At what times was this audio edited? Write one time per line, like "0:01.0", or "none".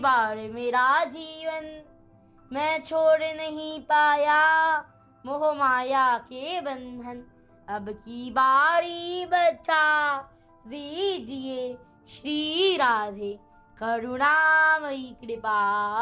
none